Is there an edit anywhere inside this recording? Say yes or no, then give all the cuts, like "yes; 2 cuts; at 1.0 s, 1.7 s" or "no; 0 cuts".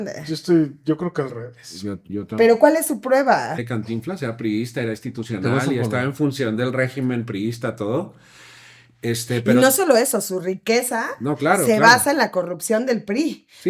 yes; 1 cut; at 3.5 s